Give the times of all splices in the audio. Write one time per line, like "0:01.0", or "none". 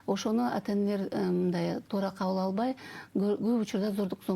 none